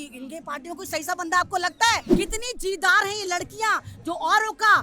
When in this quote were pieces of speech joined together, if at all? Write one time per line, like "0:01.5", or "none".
0:02.1